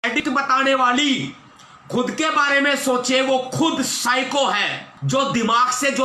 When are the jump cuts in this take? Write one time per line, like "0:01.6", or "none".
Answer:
0:04.9